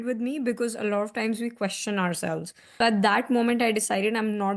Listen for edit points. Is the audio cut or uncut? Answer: uncut